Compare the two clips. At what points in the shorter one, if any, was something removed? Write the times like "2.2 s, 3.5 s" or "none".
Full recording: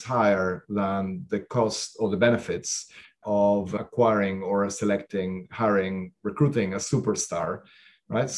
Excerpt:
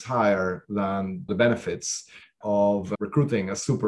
1.3 s, 2.9 s

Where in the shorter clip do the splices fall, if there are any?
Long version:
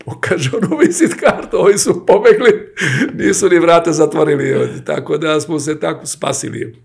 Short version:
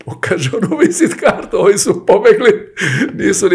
none

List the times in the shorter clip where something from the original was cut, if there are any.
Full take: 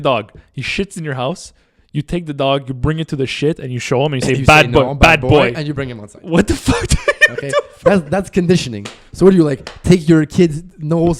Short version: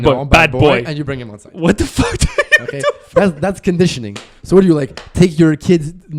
none

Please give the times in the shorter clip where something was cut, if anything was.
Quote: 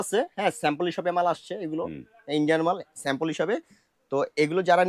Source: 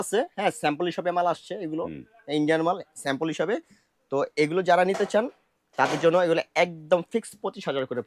none

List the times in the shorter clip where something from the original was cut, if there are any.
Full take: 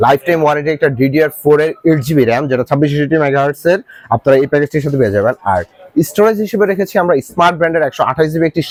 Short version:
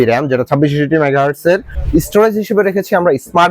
1.7 s

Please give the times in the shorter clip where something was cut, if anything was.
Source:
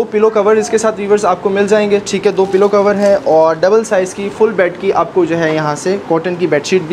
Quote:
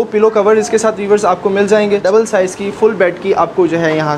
2.0 s

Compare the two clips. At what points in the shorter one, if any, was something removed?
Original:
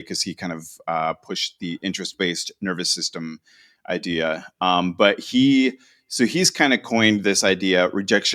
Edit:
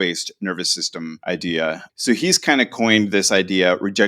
1.2 s, 1.8 s

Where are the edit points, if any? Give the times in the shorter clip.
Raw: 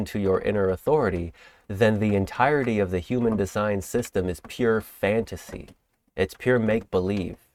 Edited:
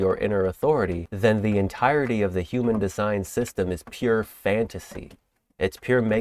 1.0 s

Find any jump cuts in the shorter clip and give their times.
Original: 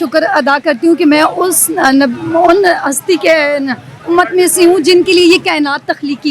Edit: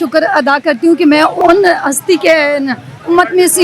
1.4 s

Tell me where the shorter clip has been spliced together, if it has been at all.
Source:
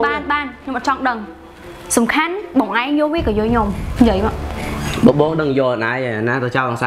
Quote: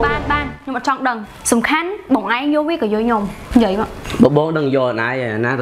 1.3 s, 4.0 s

